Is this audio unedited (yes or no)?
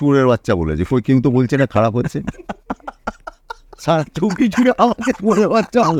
yes